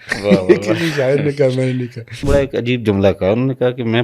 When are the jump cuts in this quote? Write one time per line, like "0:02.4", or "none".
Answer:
0:02.2